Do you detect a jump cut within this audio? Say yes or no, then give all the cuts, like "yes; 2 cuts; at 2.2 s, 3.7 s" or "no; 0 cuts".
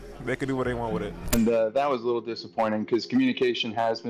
yes; 1 cut; at 1.2 s